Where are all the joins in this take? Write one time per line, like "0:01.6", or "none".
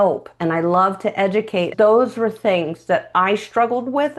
0:01.7